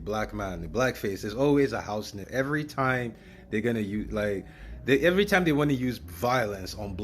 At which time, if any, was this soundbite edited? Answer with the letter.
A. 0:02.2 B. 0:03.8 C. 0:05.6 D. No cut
A